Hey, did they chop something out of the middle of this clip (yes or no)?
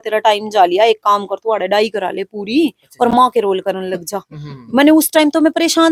no